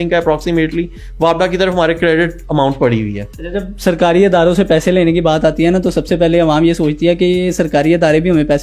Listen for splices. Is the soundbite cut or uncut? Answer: uncut